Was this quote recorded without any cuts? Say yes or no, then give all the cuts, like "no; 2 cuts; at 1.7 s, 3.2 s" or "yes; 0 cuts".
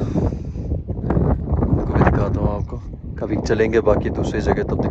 yes; 0 cuts